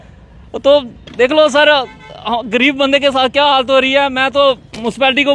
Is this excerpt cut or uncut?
uncut